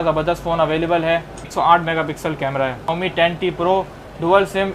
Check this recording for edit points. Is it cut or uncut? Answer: cut